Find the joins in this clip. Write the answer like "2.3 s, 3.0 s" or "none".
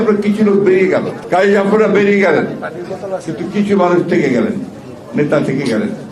1.2 s